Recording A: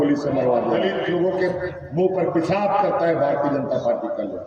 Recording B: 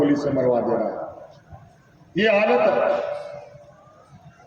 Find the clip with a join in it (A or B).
A